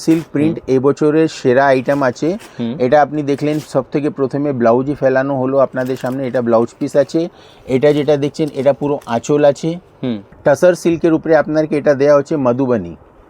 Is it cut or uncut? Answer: cut